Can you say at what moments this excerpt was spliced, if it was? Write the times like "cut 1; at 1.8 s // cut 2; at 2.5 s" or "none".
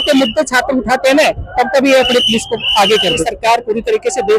cut 1; at 3.3 s